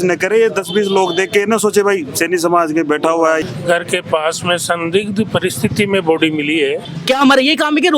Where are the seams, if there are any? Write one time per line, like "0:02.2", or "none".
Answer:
0:03.4
0:06.9